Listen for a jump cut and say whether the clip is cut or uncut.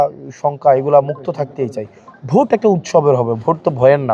uncut